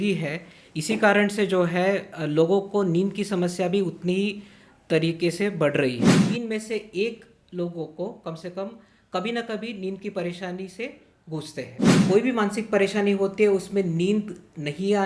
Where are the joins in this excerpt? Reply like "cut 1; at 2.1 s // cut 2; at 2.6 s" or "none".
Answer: cut 1; at 6.2 s // cut 2; at 11.9 s